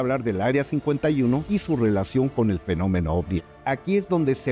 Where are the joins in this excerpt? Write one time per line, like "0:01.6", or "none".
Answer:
0:01.4
0:03.3